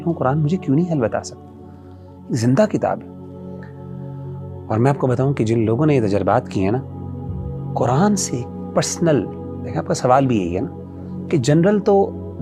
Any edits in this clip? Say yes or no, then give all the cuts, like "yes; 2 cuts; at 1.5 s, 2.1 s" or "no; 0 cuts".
no; 0 cuts